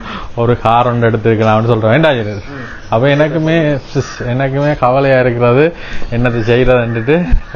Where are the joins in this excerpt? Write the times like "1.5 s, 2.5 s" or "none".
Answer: none